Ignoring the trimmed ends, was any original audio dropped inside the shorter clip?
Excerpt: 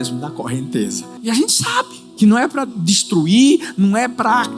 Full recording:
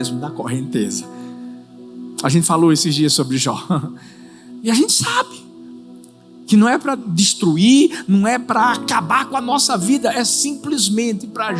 yes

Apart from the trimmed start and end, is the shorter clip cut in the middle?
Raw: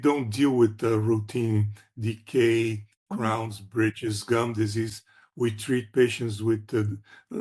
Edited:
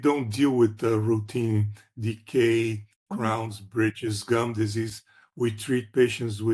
no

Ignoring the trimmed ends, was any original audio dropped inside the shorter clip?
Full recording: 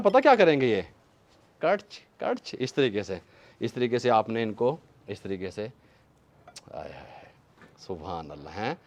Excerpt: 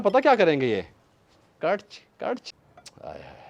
yes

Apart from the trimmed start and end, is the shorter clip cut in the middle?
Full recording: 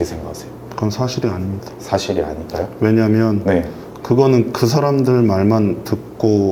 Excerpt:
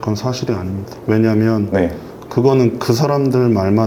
yes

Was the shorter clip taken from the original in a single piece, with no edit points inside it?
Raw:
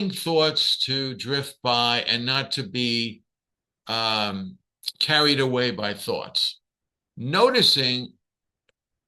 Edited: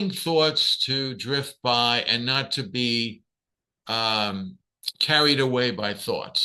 yes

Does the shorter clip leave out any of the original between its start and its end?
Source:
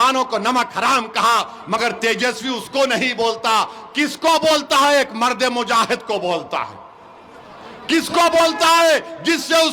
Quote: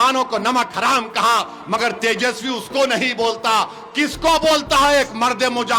no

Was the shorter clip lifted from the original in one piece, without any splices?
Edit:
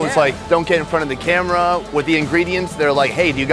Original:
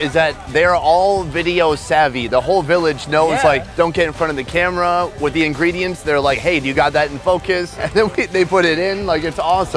yes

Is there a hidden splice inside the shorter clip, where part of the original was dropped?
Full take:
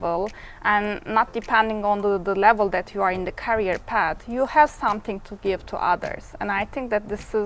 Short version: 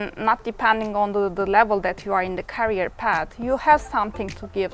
no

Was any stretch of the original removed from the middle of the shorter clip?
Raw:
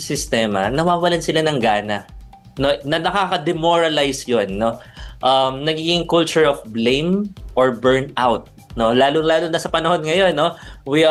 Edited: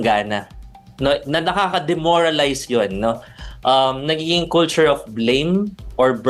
no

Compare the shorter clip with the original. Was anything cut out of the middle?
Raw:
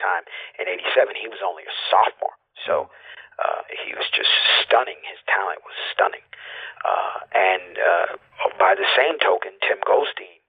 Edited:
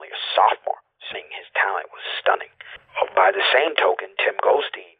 yes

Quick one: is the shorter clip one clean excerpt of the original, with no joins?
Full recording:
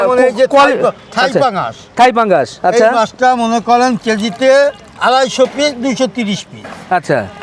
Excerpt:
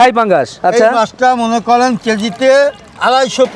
yes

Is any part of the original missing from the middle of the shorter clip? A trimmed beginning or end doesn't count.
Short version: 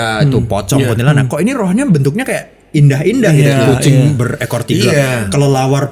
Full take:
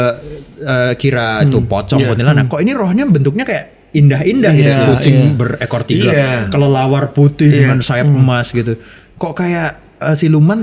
no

